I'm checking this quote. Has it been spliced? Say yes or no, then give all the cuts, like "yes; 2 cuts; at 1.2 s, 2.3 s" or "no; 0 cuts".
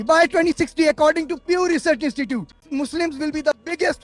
yes; 1 cut; at 2.6 s